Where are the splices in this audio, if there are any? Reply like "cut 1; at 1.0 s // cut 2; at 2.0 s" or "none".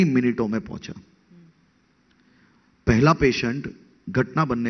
none